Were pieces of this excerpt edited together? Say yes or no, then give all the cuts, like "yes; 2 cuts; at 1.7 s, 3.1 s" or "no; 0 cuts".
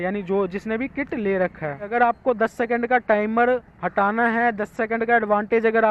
yes; 1 cut; at 1.9 s